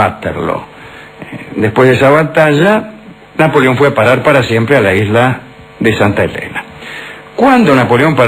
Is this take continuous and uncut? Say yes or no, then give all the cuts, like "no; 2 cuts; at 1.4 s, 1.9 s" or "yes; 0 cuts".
no; 1 cut; at 1.4 s